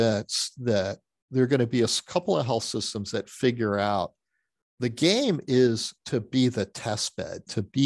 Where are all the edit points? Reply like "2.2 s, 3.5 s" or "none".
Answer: none